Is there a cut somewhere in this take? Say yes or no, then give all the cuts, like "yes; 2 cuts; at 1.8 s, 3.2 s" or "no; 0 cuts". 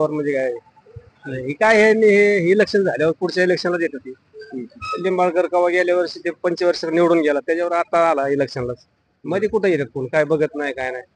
no; 0 cuts